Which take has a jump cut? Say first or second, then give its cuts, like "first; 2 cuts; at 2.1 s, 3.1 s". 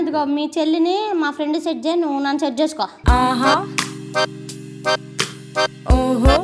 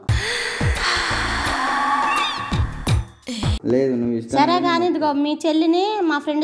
second; 1 cut; at 3.5 s